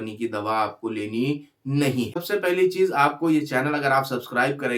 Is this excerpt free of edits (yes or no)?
no